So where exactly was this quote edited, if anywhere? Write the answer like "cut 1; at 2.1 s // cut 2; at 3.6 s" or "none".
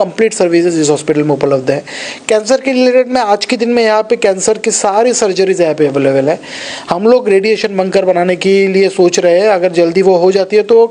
none